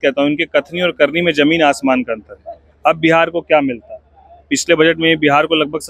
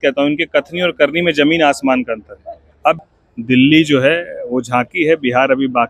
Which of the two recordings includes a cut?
second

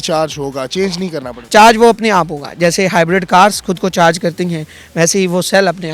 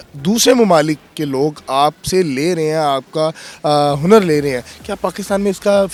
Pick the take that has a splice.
first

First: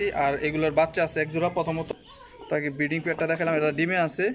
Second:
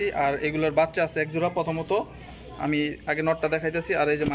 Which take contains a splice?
first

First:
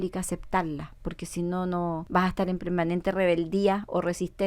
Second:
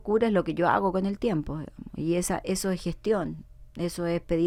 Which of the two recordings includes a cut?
first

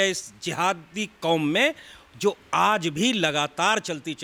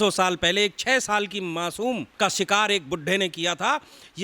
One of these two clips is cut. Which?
second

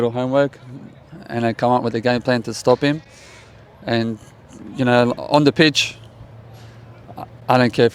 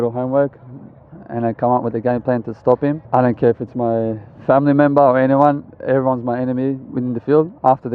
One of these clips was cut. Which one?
second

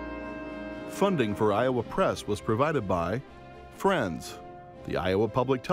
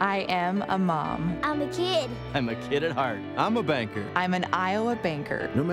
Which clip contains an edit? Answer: first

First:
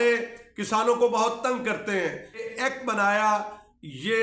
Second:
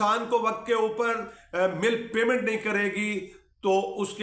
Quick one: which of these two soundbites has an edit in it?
first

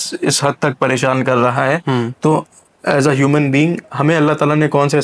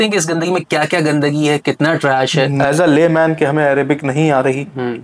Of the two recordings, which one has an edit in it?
second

